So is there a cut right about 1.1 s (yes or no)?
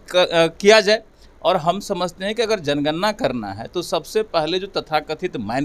no